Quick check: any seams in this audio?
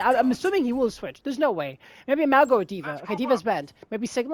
no; 0 cuts

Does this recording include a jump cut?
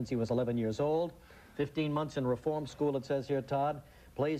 yes; 1 cut; at 2.1 s

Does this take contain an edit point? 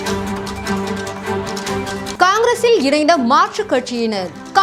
yes; 1 cut; at 2.1 s

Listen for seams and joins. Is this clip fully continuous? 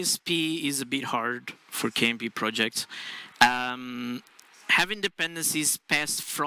yes; 0 cuts

